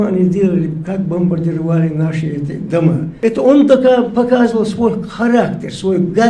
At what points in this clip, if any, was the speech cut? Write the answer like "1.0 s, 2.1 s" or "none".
3.1 s